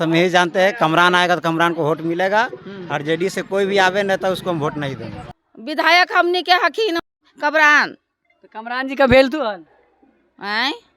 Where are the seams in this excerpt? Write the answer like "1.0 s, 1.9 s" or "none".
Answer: none